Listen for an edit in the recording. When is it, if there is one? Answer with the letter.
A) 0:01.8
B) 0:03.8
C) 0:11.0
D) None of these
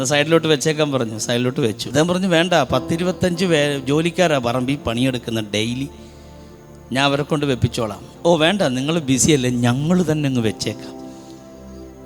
A